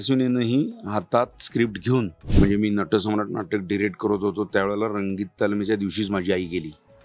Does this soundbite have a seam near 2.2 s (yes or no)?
yes